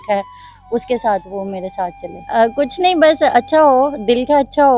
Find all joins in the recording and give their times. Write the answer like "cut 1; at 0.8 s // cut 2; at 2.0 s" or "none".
cut 1; at 2.1 s